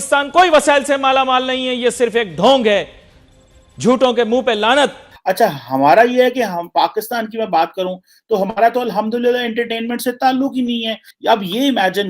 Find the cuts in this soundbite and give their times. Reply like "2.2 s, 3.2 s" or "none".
5.1 s, 11.0 s